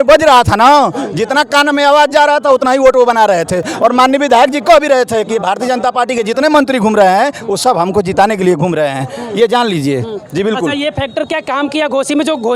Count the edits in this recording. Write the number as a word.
zero